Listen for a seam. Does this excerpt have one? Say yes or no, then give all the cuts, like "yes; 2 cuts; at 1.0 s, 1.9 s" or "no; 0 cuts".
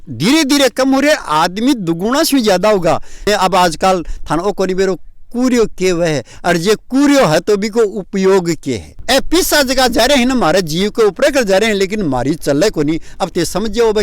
yes; 2 cuts; at 3.3 s, 8.9 s